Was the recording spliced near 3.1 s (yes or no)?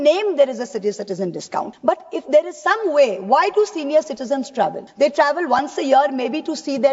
no